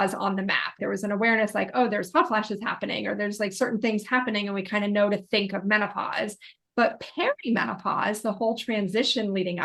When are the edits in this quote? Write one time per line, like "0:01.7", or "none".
none